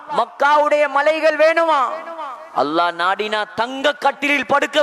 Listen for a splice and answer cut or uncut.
uncut